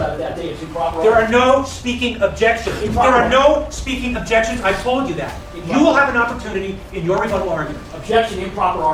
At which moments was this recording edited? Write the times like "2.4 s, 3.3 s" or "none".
none